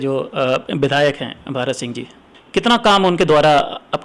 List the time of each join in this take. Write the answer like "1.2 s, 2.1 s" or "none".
2.3 s

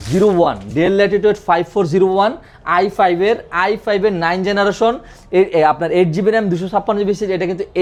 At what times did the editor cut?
none

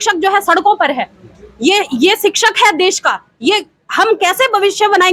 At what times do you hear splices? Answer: none

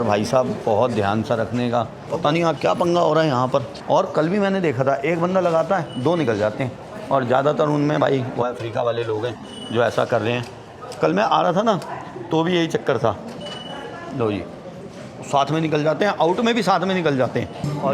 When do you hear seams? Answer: none

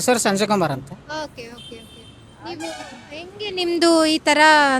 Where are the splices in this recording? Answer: none

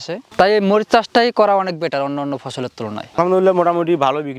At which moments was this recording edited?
3.0 s

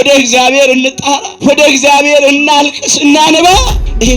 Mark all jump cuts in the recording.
1.3 s

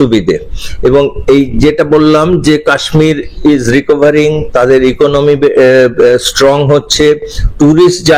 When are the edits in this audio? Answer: none

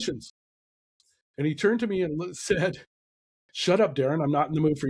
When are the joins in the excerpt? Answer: none

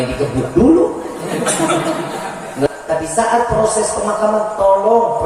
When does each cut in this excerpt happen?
2.7 s

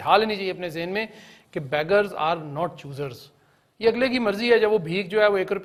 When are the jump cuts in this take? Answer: none

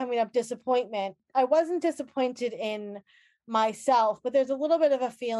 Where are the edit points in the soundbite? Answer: 1.2 s

